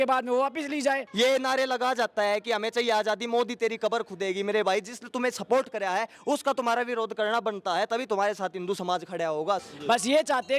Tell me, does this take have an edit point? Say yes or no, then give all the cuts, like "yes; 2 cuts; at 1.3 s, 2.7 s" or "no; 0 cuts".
yes; 2 cuts; at 1.1 s, 9.7 s